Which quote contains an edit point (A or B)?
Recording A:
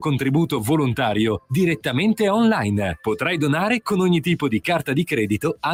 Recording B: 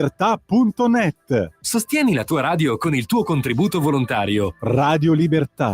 B